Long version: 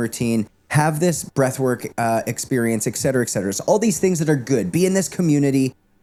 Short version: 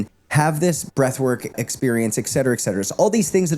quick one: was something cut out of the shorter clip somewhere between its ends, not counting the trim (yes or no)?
yes